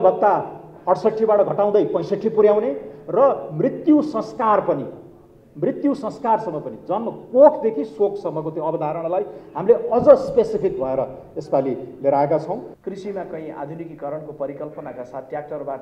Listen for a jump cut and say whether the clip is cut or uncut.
cut